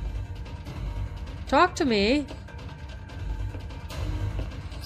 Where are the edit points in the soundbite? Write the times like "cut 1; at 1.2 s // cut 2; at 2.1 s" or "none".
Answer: none